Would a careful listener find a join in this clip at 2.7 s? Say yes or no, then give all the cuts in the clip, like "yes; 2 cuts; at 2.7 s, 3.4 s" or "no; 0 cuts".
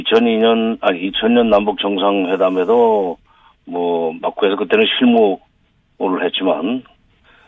no; 1 cut; at 4.5 s